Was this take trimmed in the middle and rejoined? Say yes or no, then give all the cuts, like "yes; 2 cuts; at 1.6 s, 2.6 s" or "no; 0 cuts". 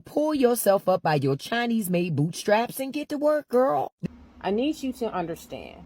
yes; 1 cut; at 3.9 s